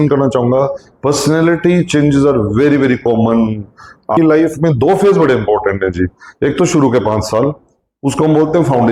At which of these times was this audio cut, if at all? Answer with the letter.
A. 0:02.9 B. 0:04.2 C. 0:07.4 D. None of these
B